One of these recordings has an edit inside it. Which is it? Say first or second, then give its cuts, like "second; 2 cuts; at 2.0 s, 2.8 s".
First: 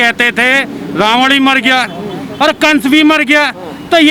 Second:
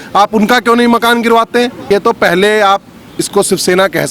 second; 1 cut; at 1.9 s